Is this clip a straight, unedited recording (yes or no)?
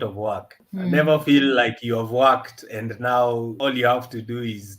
no